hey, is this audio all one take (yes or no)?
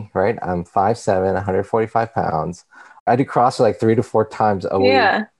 no